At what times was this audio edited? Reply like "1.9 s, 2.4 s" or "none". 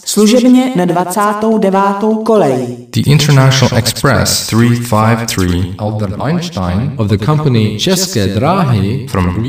2.8 s